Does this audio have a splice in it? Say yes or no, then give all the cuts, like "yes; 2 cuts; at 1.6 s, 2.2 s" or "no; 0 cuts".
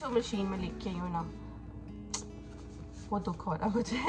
no; 0 cuts